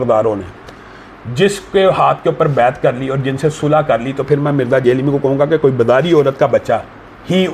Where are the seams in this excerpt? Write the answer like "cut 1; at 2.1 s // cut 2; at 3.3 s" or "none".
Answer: none